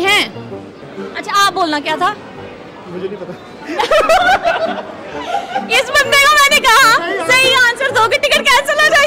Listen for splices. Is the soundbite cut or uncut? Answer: uncut